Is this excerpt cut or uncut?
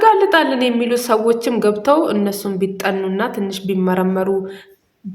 uncut